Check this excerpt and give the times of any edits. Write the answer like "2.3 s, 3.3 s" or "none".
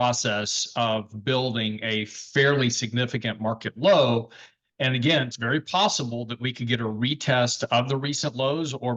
5.3 s